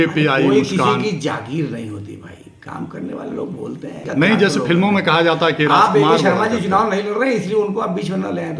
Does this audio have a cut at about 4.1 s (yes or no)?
yes